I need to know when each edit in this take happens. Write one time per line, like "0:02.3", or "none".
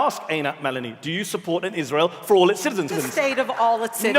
0:03.0